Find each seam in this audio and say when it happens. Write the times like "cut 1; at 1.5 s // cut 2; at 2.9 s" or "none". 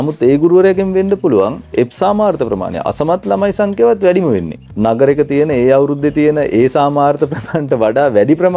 cut 1; at 4.6 s